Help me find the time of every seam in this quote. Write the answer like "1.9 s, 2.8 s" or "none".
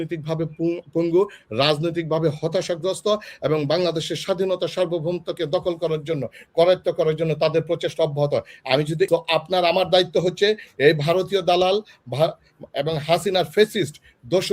9.1 s